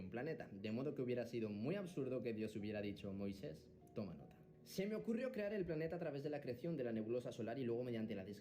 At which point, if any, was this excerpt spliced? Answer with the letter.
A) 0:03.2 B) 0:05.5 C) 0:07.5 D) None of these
B